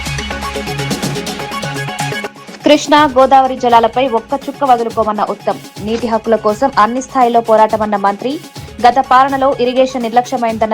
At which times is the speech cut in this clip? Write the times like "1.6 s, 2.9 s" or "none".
2.3 s